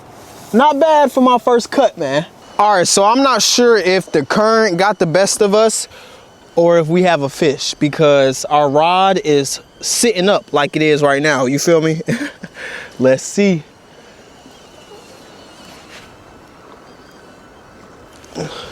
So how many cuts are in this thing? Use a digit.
1